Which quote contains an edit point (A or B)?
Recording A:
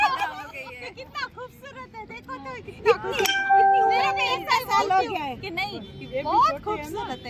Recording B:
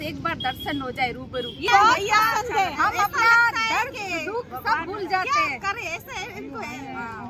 B